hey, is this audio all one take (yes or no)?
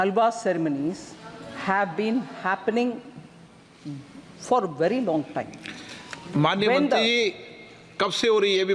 yes